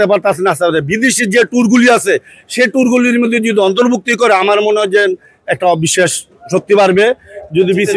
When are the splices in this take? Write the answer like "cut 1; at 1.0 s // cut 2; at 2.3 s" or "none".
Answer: none

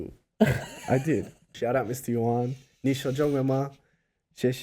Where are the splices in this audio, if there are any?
cut 1; at 1.5 s

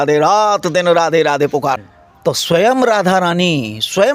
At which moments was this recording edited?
cut 1; at 1.8 s

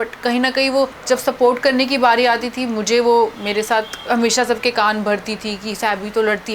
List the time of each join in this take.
cut 1; at 1.0 s // cut 2; at 3.7 s

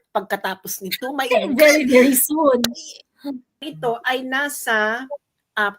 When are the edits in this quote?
cut 1; at 3.7 s

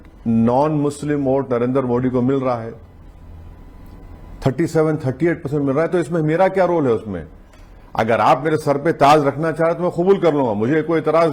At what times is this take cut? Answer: none

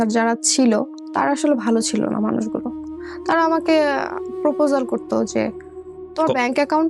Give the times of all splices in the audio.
cut 1; at 1.0 s

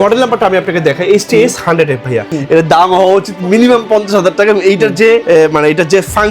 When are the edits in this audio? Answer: cut 1; at 2.3 s // cut 2; at 5.2 s

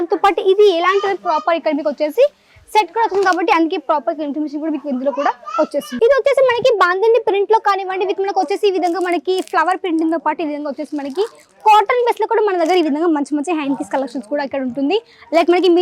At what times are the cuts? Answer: cut 1; at 5.9 s

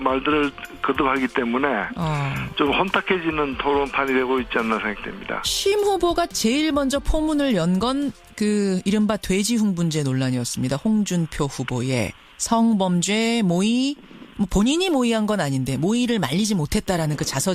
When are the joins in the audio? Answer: cut 1; at 2.5 s

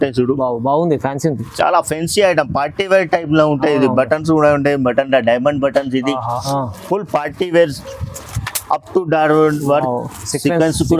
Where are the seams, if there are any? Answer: cut 1; at 6.4 s

